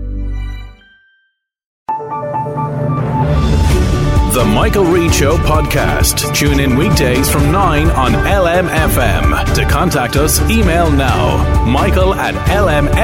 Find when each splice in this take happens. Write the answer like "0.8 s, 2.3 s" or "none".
1.8 s